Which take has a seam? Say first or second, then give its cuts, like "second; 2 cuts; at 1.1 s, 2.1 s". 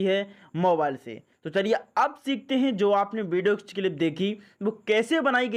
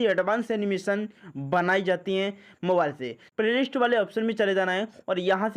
second; 1 cut; at 3.2 s